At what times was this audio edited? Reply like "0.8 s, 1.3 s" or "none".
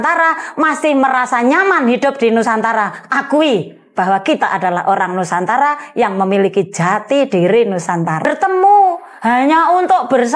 8.3 s